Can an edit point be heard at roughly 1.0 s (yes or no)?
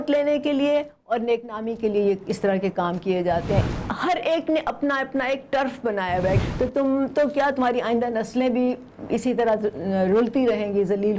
no